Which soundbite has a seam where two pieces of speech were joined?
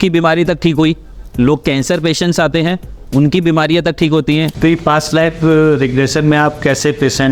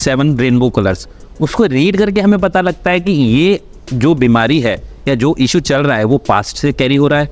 first; 1 cut; at 4.5 s

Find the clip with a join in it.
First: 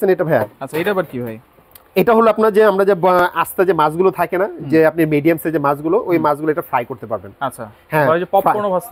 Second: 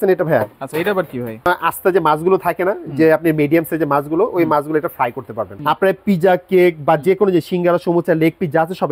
second; 2 cuts; at 1.5 s, 5.5 s

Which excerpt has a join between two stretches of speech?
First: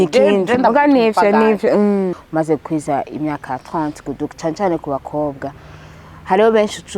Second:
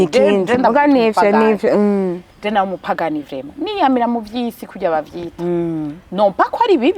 first; 1 cut; at 2.2 s

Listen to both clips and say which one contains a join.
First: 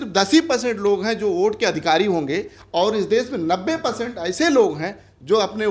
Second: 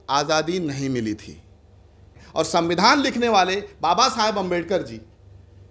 second; 1 cut; at 2.2 s

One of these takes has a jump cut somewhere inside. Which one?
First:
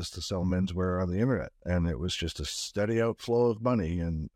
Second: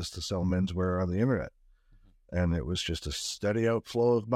first; 1 cut; at 1.5 s

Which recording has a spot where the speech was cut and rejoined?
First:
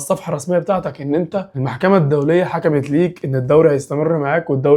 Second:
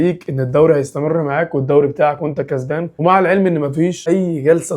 second; 2 cuts; at 2.9 s, 4.0 s

